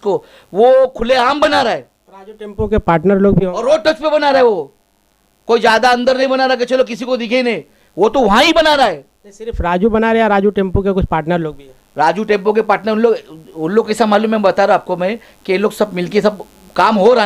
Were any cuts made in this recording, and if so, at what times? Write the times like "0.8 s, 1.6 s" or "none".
none